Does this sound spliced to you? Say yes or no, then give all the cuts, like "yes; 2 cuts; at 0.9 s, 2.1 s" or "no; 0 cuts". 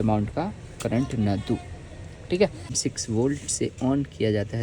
yes; 1 cut; at 2.8 s